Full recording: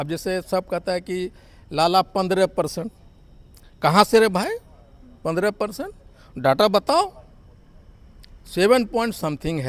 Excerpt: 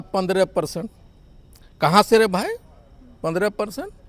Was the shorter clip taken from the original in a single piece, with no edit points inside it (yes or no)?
yes